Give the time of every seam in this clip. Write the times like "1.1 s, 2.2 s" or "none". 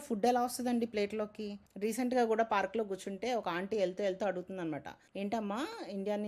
1.6 s